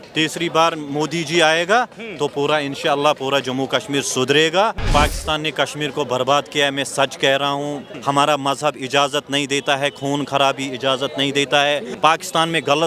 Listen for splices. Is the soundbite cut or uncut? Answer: cut